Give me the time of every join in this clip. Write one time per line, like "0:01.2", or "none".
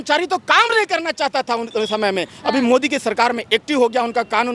none